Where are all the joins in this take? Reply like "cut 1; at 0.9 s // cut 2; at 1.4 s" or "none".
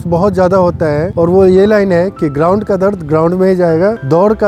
none

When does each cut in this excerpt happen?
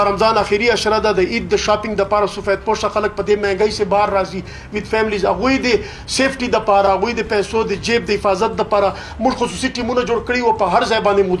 cut 1; at 6.9 s

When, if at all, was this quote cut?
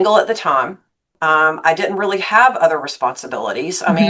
cut 1; at 1.1 s

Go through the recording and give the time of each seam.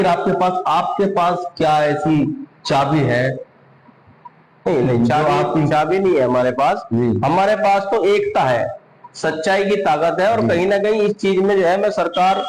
none

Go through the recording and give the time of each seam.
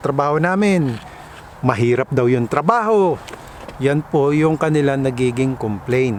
none

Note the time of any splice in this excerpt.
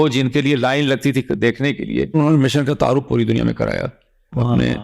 cut 1; at 2.1 s

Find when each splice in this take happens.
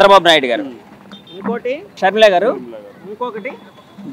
cut 1; at 2.0 s

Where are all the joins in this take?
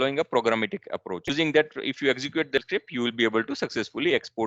cut 1; at 1.3 s // cut 2; at 2.6 s

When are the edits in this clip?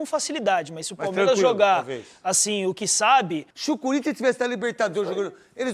cut 1; at 3.5 s

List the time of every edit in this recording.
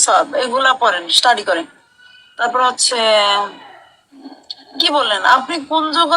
none

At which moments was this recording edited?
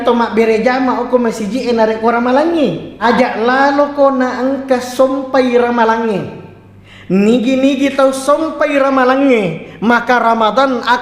cut 1; at 2.9 s

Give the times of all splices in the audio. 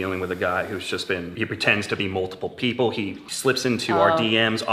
cut 1; at 1.3 s // cut 2; at 3.2 s

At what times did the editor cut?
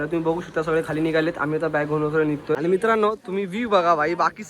cut 1; at 2.6 s

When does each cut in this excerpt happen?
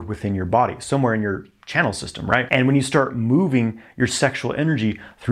none

